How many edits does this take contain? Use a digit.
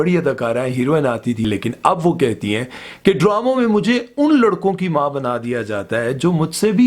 1